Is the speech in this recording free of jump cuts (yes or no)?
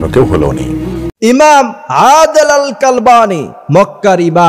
no